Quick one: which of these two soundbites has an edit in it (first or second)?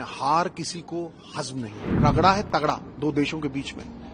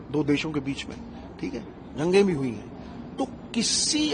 first